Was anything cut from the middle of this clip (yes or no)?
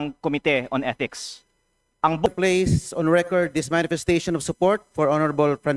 yes